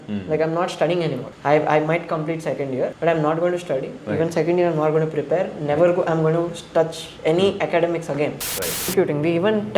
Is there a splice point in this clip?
yes; 3 cuts; at 1.3 s, 2.9 s, 8.7 s

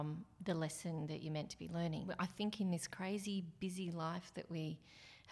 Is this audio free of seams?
no; 1 cut; at 2.1 s

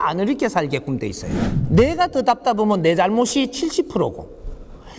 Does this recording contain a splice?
yes; 1 cut; at 1.5 s

